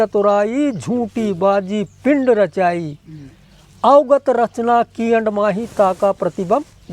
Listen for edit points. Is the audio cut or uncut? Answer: uncut